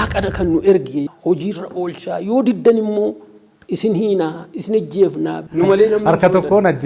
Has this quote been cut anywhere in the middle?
yes; 2 cuts; at 1.1 s, 5.4 s

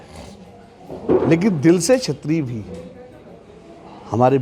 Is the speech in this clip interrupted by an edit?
no; 0 cuts

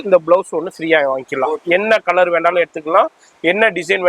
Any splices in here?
no; 0 cuts

